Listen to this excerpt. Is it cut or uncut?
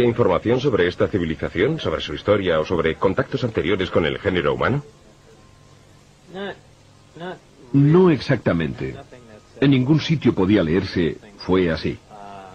uncut